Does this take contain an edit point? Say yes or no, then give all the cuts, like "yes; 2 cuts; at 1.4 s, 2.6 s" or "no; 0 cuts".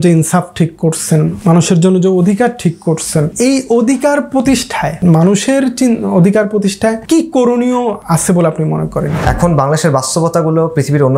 yes; 6 cuts; at 1.4 s, 3.3 s, 5.0 s, 7.0 s, 8.0 s, 9.2 s